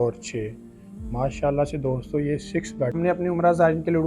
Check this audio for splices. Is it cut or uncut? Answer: cut